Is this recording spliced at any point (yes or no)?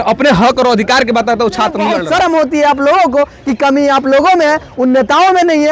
yes